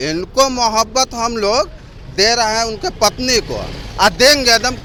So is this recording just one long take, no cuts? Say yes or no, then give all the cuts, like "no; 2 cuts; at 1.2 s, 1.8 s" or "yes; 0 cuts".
yes; 0 cuts